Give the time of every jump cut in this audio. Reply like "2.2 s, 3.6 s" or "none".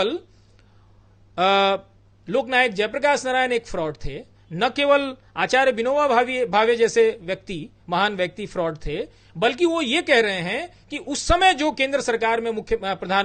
none